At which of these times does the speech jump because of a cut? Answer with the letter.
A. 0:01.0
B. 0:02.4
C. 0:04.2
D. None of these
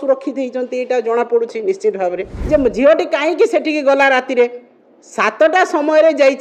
B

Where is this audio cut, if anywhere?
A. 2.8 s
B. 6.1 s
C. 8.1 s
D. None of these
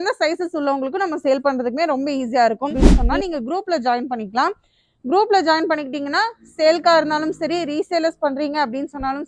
A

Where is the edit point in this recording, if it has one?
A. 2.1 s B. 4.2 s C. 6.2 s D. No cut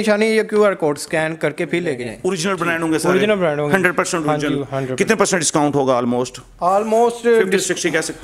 A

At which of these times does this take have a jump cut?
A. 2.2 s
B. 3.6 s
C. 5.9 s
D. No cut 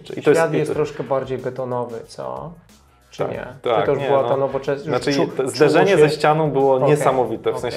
D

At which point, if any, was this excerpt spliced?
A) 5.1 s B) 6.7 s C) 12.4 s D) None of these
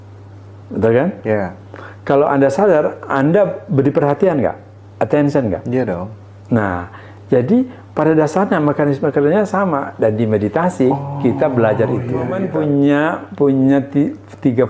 C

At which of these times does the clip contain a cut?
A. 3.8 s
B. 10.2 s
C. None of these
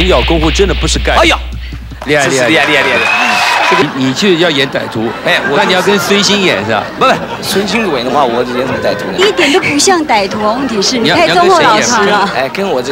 A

